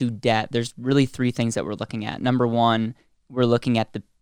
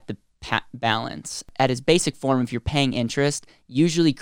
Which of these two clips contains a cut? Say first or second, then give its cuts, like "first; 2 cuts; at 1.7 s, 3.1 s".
second; 1 cut; at 1.5 s